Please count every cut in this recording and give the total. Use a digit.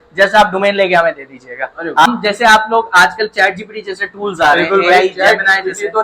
1